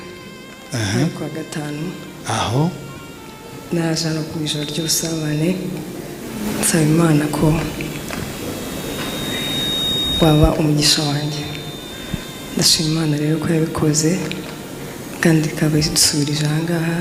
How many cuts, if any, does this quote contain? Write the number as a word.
zero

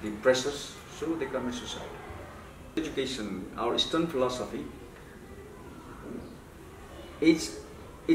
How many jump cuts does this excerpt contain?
one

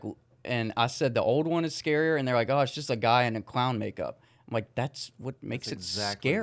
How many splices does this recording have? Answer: zero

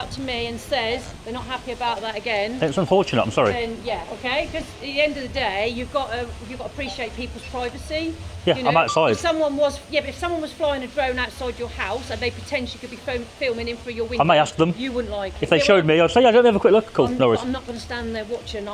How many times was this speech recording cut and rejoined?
zero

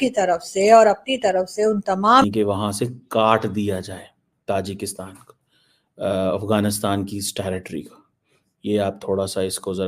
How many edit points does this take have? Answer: one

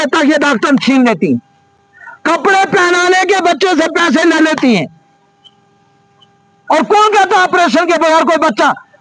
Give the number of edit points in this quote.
zero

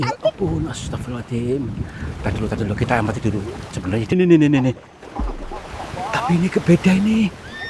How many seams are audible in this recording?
one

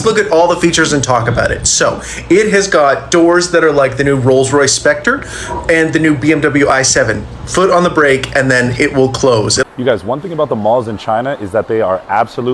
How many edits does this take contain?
one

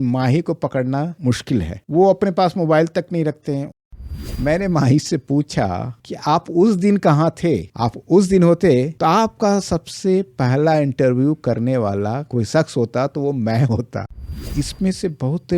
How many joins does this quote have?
two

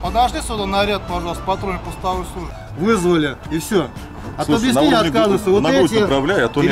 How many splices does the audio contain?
one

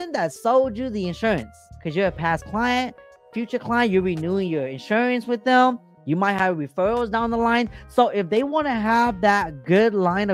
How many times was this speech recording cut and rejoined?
one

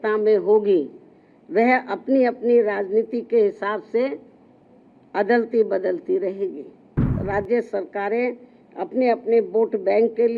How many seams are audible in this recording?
one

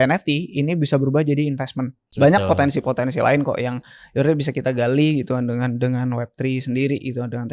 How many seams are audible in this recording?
one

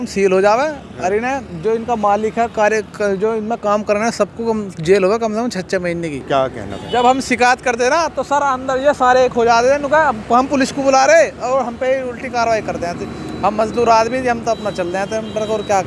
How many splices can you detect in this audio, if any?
one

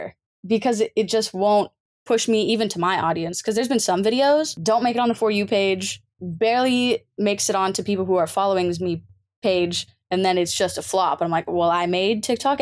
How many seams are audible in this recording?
one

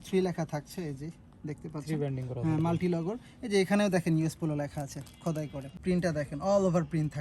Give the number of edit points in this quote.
one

